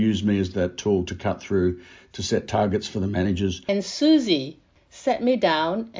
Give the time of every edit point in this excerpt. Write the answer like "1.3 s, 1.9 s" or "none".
3.6 s, 4.7 s